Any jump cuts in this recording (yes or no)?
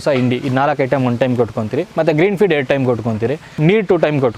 yes